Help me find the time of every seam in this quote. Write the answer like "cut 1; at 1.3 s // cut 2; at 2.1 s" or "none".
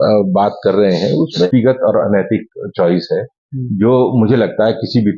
cut 1; at 1.5 s